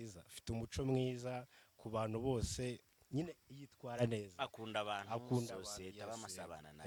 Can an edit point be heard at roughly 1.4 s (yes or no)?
no